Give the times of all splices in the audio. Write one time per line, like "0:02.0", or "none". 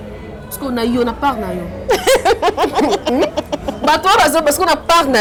none